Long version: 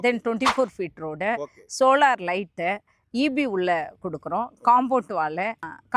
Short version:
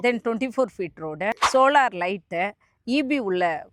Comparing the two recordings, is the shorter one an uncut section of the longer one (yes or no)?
no